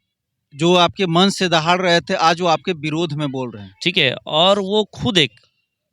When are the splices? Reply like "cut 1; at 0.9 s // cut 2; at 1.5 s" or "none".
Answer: cut 1; at 3.6 s